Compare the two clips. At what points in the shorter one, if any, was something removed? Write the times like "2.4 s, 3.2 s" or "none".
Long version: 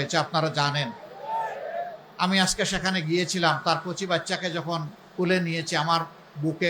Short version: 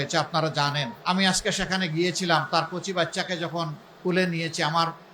0.9 s